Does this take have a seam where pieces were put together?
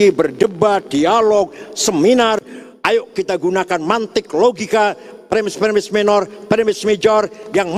no; 0 cuts

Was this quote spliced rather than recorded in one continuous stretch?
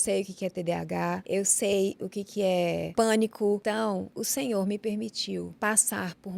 yes; 4 cuts; at 1.2 s, 2.9 s, 4.0 s, 5.5 s

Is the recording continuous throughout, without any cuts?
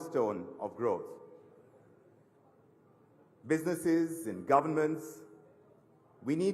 no; 2 cuts; at 1.2 s, 3.6 s

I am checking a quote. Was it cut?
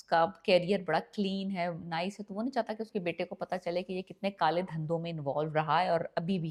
no; 0 cuts

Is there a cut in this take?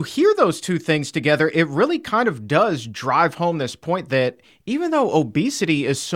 no; 0 cuts

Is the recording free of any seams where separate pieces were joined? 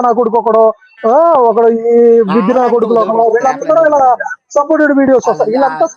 yes; 0 cuts

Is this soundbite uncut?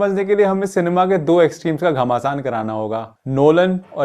yes; 0 cuts

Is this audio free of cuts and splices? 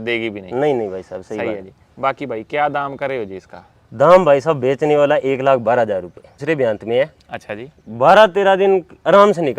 no; 1 cut; at 6.4 s

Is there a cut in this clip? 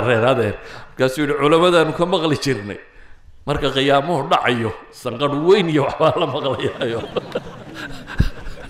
no; 0 cuts

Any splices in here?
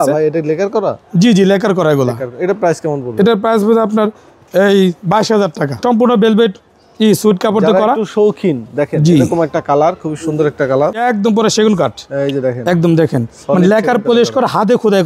yes; 2 cuts; at 5.8 s, 11.0 s

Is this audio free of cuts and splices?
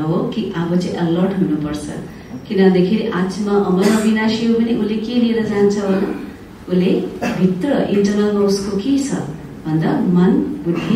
yes; 0 cuts

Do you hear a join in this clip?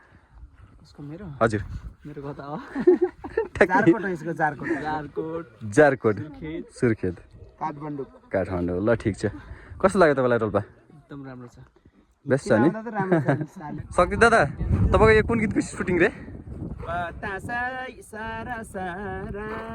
yes; 1 cut; at 13.6 s

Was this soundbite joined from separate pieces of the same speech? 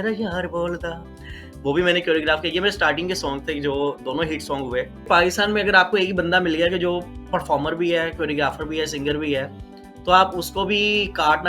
yes; 1 cut; at 5.1 s

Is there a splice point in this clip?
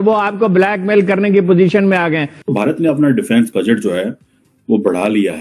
yes; 1 cut; at 2.4 s

